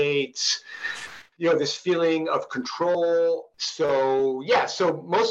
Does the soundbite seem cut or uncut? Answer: cut